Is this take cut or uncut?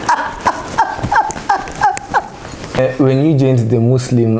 cut